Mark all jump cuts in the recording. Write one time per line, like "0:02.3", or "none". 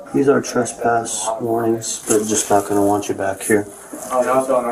none